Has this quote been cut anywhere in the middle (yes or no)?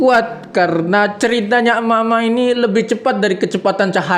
no